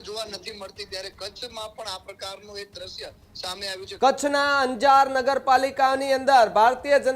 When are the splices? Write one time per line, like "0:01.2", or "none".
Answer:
0:03.8